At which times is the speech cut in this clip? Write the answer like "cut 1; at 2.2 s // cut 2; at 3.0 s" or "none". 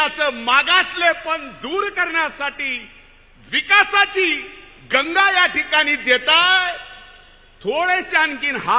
none